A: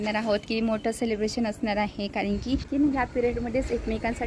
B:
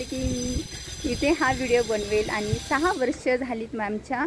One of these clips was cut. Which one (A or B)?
A